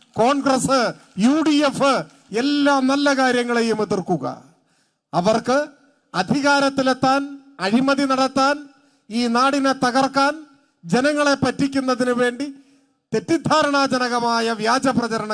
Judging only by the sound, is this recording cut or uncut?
uncut